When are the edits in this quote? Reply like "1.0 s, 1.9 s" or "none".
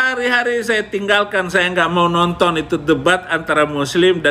none

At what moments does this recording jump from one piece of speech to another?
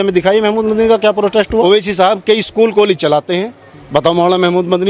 1.6 s

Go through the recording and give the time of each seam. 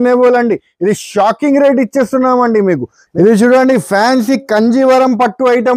2.9 s

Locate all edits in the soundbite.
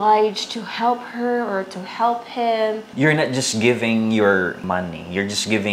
2.9 s

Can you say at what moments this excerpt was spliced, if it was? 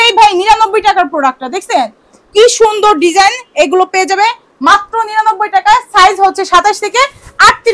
none

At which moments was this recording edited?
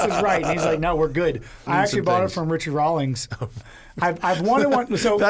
1.7 s

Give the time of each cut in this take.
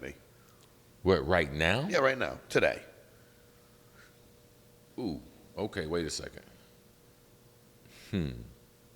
7.8 s

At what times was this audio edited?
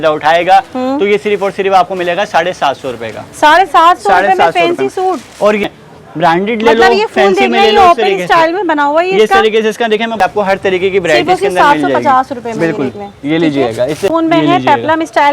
5.6 s, 10.2 s, 14.1 s

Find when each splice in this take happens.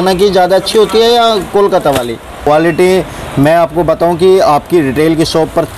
2.4 s

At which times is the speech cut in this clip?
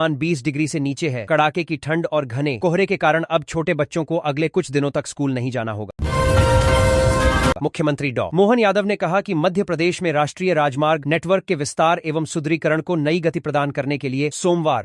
5.9 s, 7.6 s

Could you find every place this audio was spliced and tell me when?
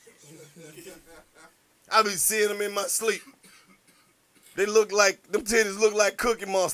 none

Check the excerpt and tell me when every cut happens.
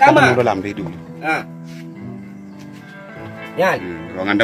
none

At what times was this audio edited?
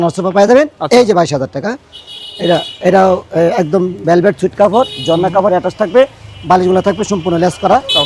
none

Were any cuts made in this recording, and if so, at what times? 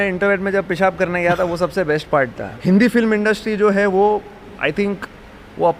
2.4 s

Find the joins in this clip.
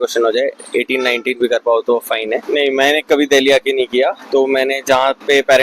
2.4 s

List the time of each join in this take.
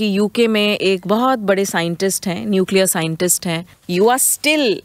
3.7 s

